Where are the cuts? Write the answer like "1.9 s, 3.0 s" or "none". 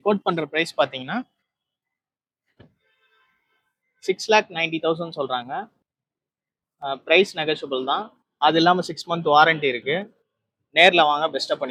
none